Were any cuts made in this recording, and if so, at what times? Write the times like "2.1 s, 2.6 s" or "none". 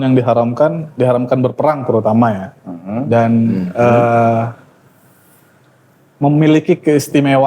none